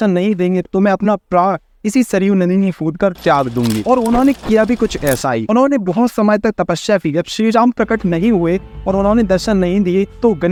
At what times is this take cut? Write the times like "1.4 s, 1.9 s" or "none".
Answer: none